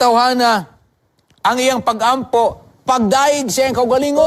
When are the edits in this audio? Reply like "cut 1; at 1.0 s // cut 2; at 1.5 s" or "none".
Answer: none